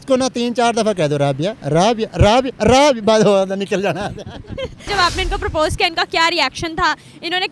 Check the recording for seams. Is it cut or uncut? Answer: cut